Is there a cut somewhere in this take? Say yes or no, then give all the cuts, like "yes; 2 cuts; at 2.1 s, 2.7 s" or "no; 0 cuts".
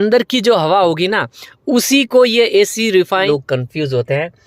yes; 1 cut; at 3.3 s